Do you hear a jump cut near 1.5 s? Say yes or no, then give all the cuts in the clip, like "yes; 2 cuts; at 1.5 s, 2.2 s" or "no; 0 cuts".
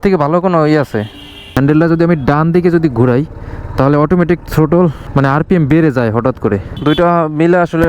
yes; 3 cuts; at 1.5 s, 5.0 s, 6.7 s